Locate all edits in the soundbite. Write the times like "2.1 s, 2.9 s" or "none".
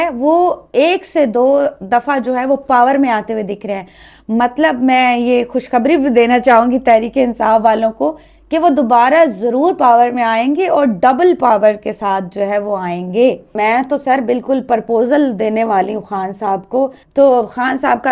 13.5 s, 17.0 s